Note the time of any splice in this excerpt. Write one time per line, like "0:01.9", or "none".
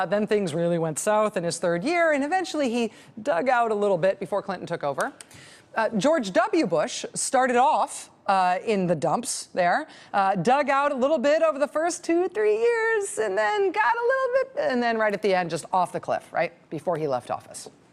0:09.3